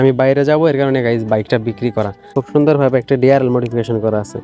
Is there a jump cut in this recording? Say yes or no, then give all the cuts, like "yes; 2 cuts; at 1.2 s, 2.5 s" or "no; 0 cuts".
yes; 1 cut; at 2.2 s